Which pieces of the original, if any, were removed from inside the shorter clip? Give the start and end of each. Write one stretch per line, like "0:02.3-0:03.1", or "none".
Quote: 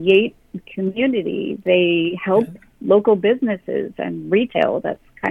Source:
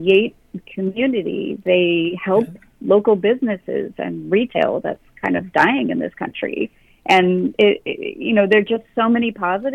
none